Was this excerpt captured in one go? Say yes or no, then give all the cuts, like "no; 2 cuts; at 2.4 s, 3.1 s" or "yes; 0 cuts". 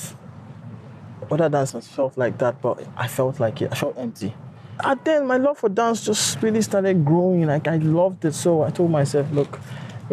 no; 1 cut; at 4.7 s